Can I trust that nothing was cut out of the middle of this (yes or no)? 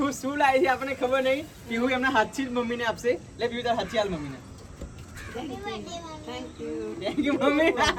yes